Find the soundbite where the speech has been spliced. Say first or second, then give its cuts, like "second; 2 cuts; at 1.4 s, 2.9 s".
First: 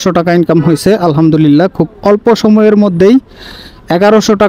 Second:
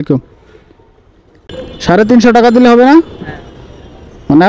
second; 1 cut; at 1.5 s